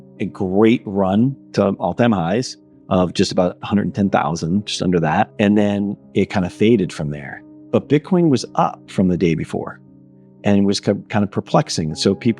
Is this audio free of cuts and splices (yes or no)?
no